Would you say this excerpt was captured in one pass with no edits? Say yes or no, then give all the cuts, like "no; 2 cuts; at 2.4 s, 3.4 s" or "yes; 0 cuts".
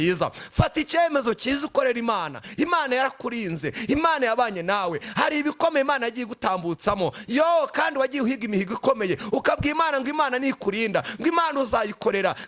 yes; 0 cuts